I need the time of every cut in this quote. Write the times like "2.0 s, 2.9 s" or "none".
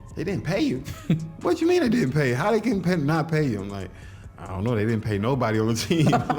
none